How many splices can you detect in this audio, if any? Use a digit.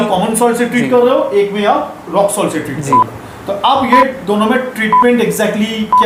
0